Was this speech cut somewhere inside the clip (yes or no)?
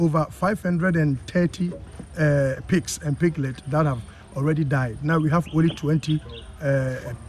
no